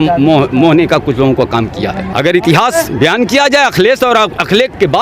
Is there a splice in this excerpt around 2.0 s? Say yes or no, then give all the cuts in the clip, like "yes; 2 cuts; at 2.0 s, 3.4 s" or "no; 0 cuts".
yes; 1 cut; at 2.0 s